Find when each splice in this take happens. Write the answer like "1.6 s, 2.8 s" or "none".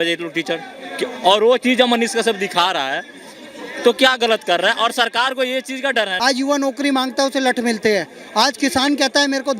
6.1 s